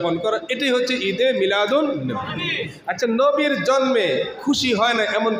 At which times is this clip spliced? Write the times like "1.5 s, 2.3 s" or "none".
none

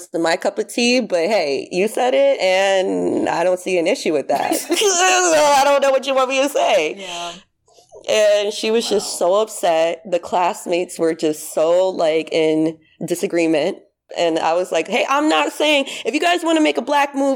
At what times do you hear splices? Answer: 14.1 s

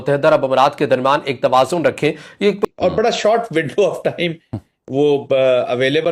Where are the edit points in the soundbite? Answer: 2.6 s

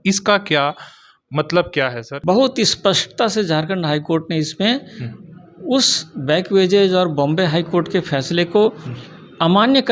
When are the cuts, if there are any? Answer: 2.1 s

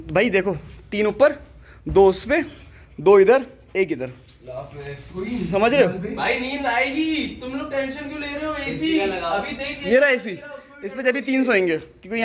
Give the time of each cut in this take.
none

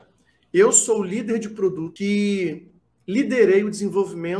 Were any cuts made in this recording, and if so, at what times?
1.9 s

